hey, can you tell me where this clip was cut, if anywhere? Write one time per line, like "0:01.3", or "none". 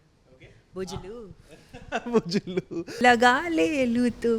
0:02.9